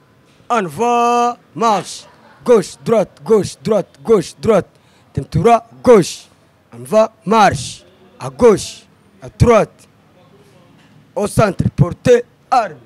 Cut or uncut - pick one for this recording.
uncut